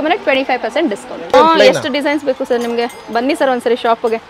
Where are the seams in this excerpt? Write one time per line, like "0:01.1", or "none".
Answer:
0:01.3